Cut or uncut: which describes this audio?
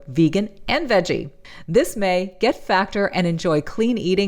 cut